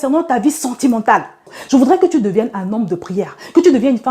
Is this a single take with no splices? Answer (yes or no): no